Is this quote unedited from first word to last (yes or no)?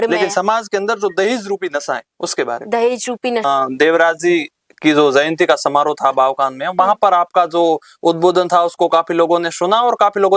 no